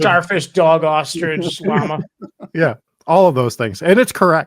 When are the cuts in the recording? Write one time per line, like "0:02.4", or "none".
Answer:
0:02.9